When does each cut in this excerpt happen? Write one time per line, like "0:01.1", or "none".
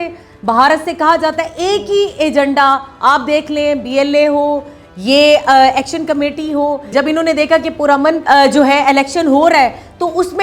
0:06.9
0:08.2